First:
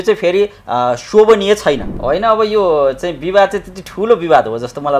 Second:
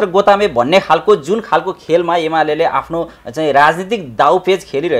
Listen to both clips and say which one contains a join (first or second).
first